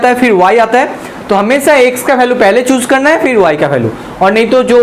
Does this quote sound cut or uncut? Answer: uncut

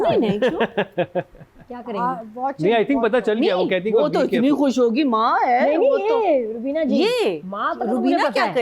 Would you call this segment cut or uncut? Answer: uncut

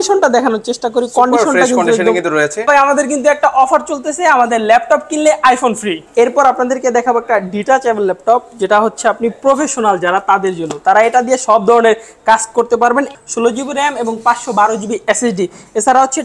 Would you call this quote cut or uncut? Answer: cut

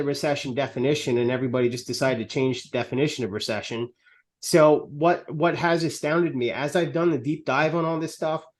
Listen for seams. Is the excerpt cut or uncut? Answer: uncut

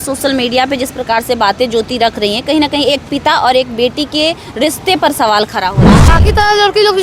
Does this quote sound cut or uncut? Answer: cut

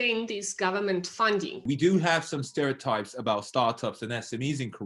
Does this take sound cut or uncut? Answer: cut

